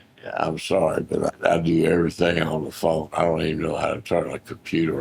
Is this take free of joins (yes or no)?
yes